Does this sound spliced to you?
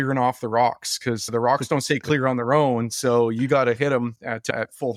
no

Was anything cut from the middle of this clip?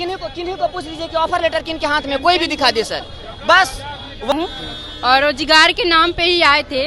yes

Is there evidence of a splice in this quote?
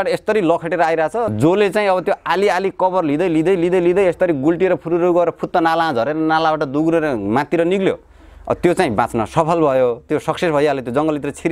yes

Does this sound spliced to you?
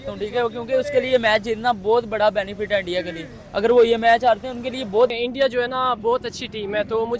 yes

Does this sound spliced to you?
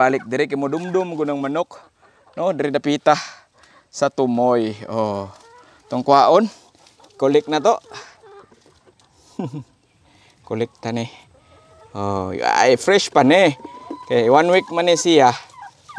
no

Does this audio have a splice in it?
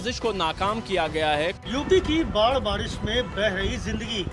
yes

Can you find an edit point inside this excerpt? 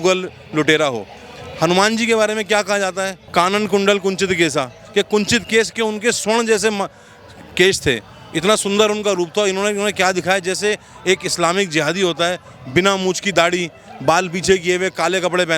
yes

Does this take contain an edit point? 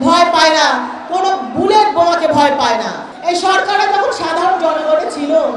yes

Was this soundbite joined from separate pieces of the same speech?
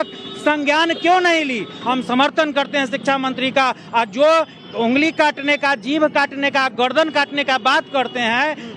yes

